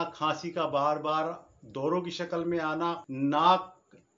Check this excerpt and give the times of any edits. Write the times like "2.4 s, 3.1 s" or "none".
3.1 s